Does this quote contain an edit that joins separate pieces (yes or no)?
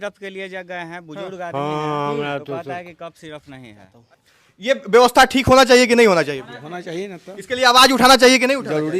yes